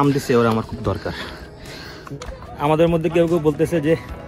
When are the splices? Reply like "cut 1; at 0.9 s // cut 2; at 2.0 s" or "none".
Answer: cut 1; at 2.0 s